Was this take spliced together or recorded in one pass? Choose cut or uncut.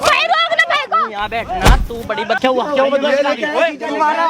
cut